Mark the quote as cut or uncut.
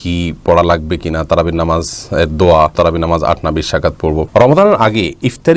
cut